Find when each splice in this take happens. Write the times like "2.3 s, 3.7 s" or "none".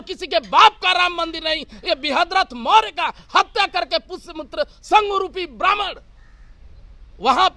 none